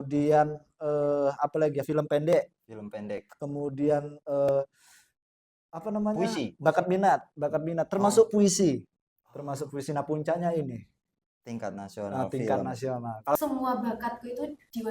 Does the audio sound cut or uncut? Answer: cut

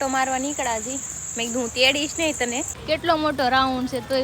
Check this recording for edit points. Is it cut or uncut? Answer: cut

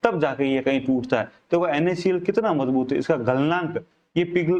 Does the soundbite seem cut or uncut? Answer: uncut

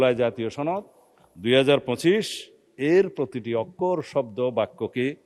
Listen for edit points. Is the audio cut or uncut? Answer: uncut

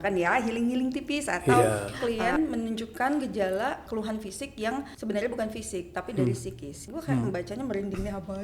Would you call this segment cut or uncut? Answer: cut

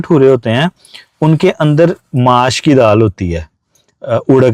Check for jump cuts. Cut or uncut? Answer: uncut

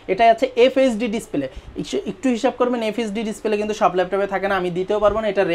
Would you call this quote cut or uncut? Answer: uncut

